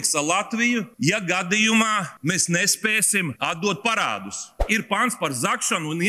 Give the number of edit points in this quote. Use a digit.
4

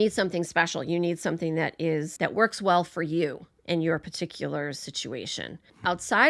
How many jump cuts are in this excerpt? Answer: 0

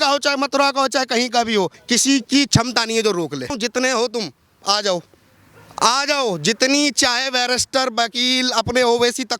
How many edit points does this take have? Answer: 2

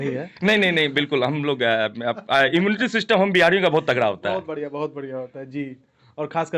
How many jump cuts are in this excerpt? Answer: 0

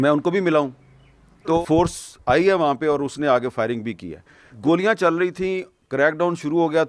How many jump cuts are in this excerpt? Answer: 2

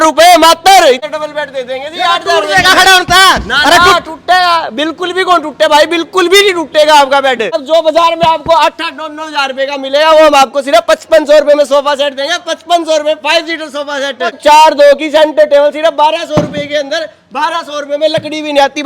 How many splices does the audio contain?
3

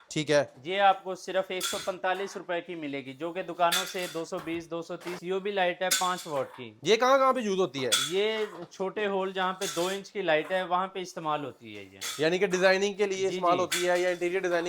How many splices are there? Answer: 1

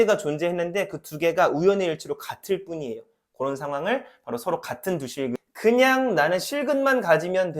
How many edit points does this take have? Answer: 1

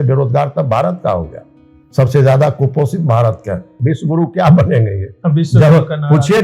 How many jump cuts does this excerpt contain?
1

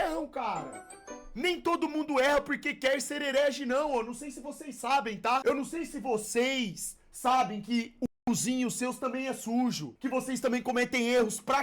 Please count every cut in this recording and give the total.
2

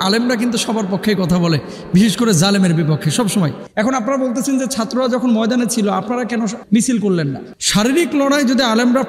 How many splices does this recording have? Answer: 2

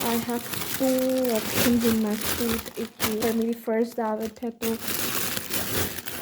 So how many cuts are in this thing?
1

